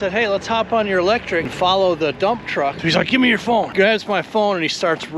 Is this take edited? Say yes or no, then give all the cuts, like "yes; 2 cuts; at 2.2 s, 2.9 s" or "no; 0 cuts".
yes; 3 cuts; at 1.5 s, 2.8 s, 3.7 s